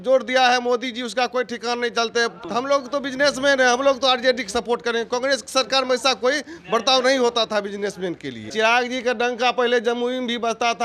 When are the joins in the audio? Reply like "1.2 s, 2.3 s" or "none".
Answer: 2.4 s, 8.5 s